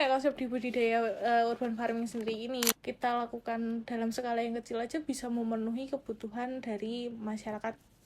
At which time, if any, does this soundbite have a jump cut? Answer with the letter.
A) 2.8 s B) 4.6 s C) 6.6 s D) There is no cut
A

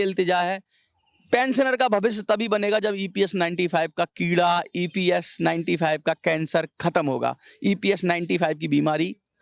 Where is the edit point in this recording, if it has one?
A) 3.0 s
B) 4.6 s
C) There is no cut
C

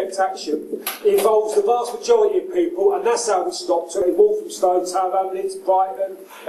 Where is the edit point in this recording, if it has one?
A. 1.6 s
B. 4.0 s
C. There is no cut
B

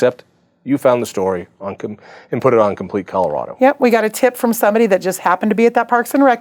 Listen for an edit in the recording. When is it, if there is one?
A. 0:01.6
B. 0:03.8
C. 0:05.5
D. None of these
D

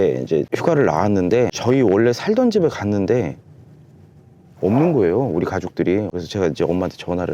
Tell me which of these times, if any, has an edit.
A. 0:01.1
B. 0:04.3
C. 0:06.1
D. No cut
C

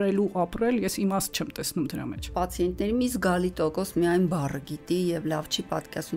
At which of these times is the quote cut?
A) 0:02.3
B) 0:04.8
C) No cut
A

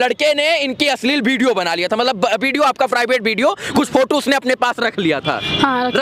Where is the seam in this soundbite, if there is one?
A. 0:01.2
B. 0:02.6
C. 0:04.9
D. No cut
D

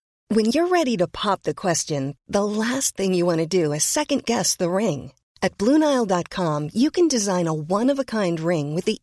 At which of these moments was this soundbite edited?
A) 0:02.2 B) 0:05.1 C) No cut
C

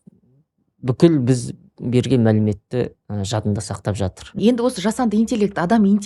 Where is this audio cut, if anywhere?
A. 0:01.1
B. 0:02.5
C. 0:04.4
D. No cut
C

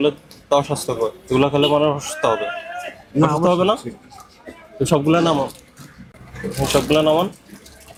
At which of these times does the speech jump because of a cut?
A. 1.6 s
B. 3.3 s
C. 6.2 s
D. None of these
D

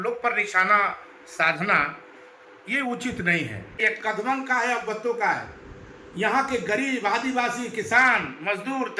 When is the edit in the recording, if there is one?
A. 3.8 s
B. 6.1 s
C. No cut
A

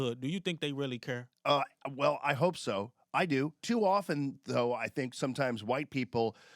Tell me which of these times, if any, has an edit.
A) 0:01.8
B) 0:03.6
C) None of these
B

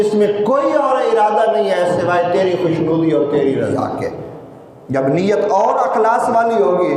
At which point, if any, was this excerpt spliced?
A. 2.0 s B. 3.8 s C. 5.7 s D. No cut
D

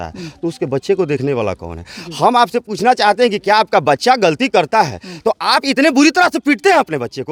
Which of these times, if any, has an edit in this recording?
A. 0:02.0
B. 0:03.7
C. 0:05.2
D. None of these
D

